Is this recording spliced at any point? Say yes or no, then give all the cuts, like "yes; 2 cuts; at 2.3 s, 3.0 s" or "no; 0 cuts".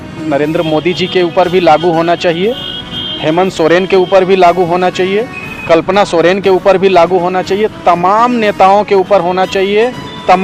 no; 0 cuts